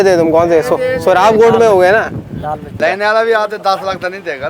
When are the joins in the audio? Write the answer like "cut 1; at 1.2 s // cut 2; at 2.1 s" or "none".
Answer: cut 1; at 2.8 s

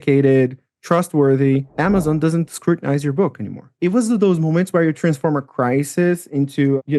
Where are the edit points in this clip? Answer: cut 1; at 3.7 s

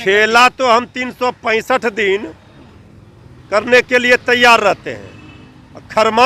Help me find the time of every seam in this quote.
none

